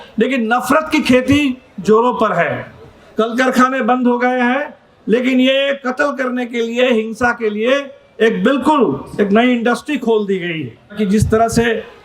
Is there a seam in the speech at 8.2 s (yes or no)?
no